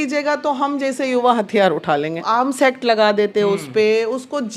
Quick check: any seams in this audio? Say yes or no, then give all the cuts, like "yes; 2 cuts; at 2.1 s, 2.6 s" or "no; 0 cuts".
yes; 1 cut; at 2.3 s